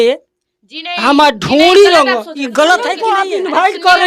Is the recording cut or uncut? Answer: cut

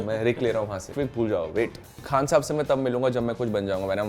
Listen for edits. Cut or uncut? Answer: cut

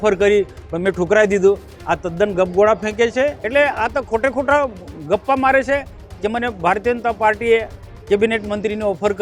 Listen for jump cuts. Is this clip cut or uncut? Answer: cut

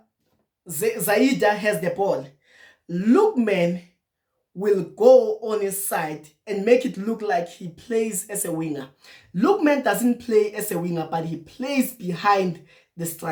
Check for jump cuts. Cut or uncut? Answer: uncut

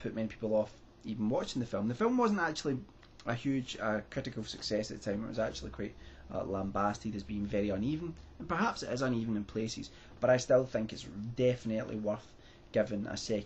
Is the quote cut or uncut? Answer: cut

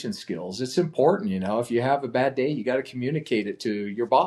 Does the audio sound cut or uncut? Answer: uncut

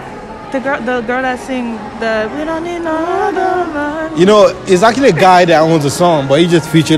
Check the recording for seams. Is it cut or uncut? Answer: uncut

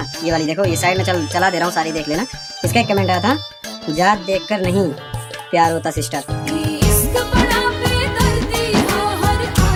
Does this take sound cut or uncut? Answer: uncut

